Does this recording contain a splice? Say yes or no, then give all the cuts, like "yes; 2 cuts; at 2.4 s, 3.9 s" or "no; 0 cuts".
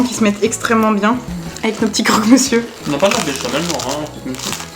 no; 0 cuts